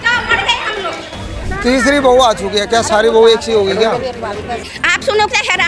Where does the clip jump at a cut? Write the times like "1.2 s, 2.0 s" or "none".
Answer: 1.5 s, 4.6 s